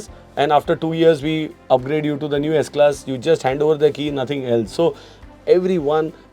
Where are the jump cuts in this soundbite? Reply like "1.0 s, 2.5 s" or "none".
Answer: 5.2 s